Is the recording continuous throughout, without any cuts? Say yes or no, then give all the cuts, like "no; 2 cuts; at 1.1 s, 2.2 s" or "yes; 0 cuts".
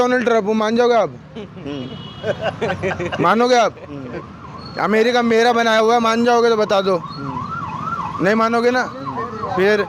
yes; 0 cuts